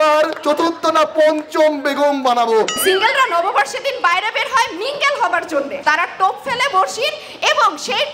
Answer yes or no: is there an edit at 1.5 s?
no